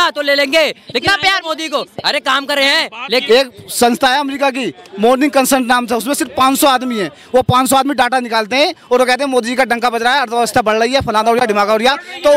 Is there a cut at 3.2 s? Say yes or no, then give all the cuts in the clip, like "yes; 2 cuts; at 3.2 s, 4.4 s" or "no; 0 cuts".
yes; 1 cut; at 3.2 s